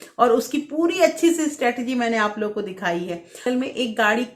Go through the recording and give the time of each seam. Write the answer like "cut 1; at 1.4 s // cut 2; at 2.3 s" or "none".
cut 1; at 3.4 s